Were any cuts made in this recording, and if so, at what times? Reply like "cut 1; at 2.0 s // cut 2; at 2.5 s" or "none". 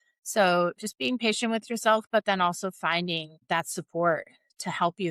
cut 1; at 3.4 s